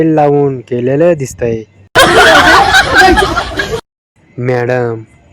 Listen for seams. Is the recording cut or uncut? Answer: cut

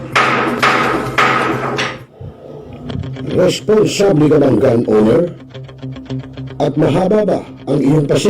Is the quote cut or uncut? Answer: cut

